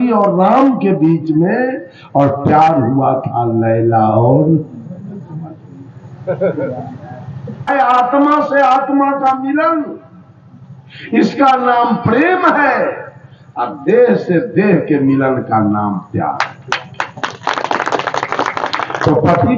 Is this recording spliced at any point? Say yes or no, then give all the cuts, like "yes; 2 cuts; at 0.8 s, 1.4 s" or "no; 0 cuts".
yes; 1 cut; at 7.7 s